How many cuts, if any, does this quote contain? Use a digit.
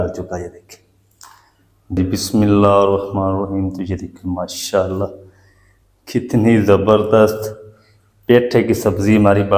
1